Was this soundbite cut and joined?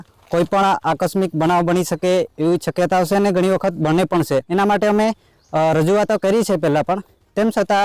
yes; 1 cut; at 4.5 s

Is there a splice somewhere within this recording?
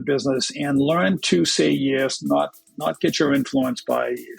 no; 0 cuts

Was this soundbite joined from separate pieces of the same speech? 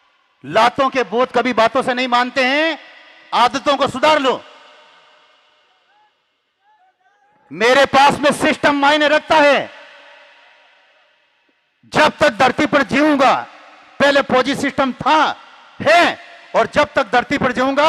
no; 0 cuts

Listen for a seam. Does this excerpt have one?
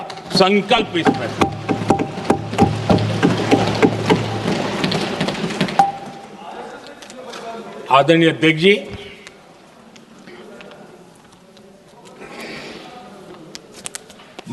no; 0 cuts

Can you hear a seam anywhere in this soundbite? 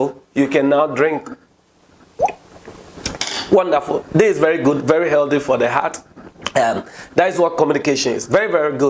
no; 0 cuts

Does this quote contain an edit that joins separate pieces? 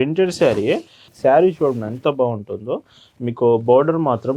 yes; 1 cut; at 1.0 s

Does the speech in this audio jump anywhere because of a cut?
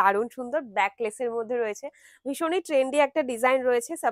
no; 0 cuts

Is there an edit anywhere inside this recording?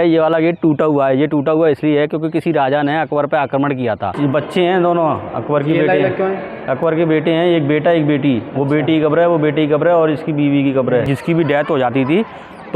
yes; 2 cuts; at 4.1 s, 11.1 s

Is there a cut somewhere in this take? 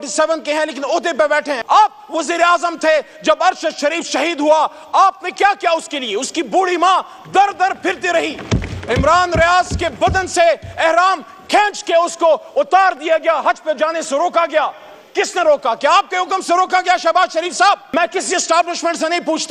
yes; 2 cuts; at 1.5 s, 17.9 s

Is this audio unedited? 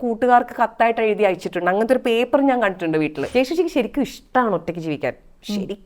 no; 1 cut; at 3.3 s

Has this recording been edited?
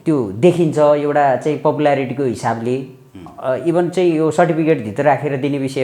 no; 0 cuts

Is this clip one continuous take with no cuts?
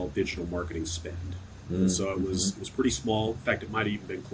yes; 0 cuts

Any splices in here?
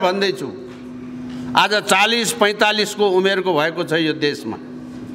no; 0 cuts

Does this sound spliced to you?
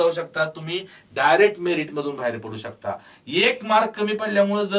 no; 0 cuts

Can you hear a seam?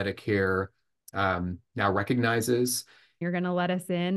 yes; 1 cut; at 3.2 s

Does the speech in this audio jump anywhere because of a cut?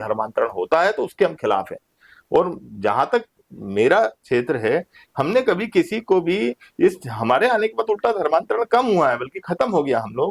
no; 0 cuts

